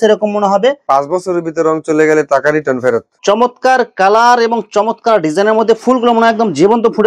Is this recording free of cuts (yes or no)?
no